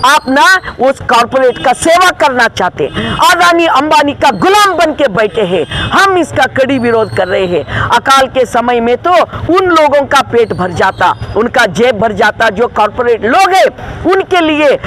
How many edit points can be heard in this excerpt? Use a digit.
0